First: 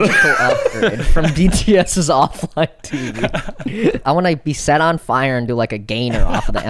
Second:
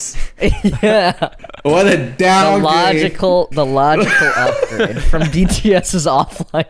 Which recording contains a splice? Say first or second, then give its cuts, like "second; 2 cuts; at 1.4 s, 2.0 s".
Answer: first; 1 cut; at 4.0 s